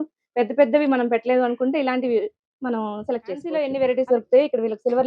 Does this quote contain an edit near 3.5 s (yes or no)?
yes